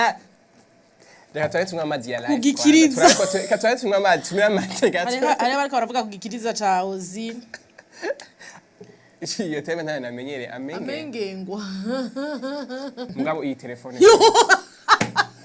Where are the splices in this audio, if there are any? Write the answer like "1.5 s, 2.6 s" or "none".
13.1 s

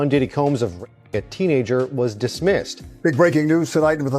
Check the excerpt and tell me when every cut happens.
2.8 s

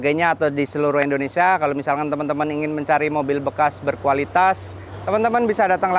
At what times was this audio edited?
4.9 s

